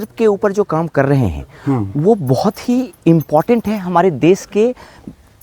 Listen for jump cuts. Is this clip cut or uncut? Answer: uncut